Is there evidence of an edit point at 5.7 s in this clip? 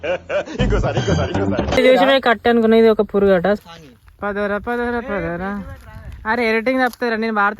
no; 2 cuts; at 1.8 s, 3.6 s

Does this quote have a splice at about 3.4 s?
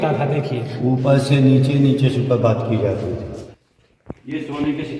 yes; 1 cut; at 3.4 s

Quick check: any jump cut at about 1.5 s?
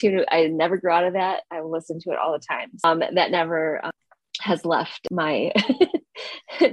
no; 3 cuts; at 2.8 s, 3.9 s, 5.0 s

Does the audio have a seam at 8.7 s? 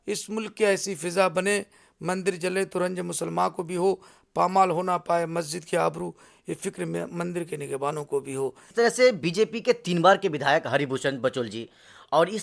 yes; 1 cut; at 8.7 s

